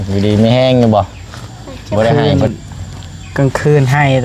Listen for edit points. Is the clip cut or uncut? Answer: cut